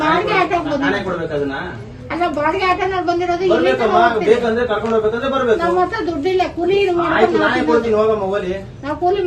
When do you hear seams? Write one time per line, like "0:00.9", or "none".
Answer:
none